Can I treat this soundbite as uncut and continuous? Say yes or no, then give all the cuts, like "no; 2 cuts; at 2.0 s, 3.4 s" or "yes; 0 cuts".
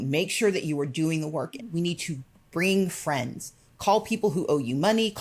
no; 1 cut; at 1.6 s